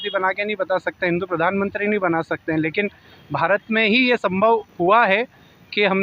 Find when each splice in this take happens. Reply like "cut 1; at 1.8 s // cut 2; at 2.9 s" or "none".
none